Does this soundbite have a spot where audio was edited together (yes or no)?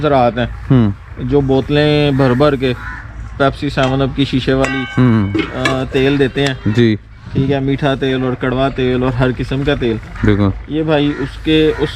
no